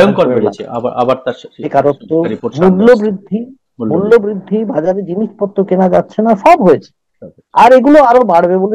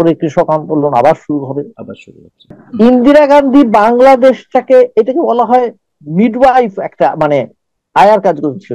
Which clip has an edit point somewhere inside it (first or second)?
second